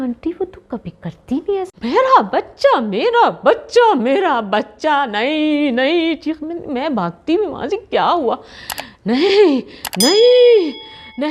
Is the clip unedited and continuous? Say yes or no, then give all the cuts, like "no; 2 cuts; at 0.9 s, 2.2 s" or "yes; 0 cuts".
no; 1 cut; at 1.7 s